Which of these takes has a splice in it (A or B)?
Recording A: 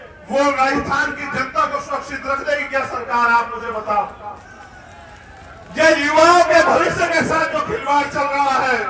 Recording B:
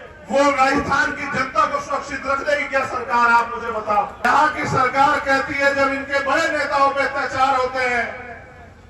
B